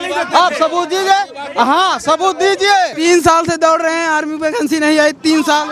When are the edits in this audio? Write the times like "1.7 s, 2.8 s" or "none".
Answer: 2.9 s